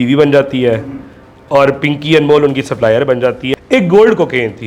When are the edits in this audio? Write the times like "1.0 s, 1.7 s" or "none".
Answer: 3.4 s